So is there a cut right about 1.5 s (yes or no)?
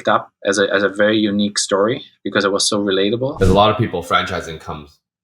no